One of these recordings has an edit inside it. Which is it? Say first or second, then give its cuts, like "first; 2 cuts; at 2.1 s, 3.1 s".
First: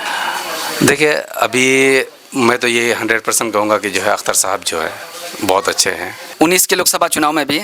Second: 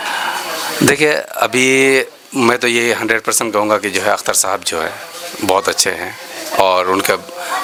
first; 1 cut; at 6.2 s